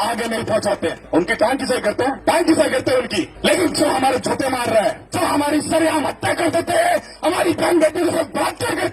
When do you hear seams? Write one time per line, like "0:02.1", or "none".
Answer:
0:01.0
0:02.2
0:03.3
0:05.0